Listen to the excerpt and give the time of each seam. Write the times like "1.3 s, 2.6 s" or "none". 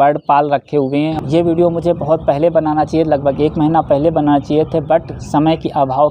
1.1 s